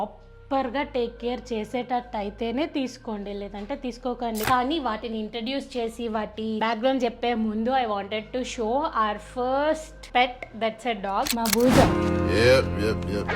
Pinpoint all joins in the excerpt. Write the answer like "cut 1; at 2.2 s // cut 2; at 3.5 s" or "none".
cut 1; at 4.5 s // cut 2; at 11.3 s